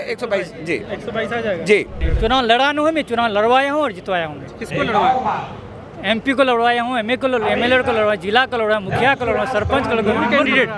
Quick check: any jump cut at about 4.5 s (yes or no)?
no